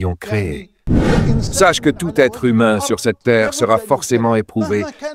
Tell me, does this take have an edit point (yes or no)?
yes